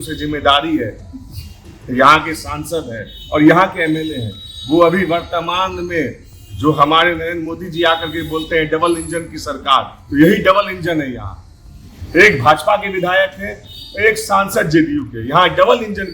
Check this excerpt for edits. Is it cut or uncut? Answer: uncut